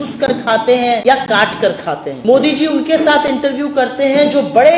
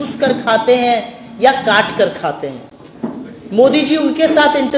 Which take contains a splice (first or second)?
first